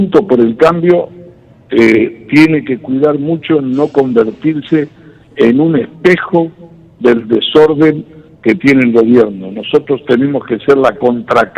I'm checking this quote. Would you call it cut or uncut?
uncut